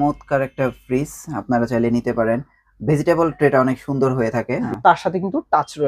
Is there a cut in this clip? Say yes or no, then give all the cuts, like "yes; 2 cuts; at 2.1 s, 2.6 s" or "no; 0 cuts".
yes; 1 cut; at 4.7 s